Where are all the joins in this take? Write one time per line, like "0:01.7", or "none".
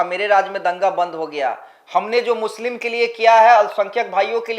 none